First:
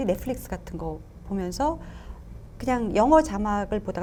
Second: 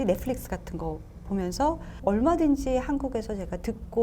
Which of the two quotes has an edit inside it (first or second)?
second